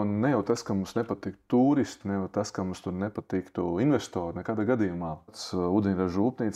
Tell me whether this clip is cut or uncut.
cut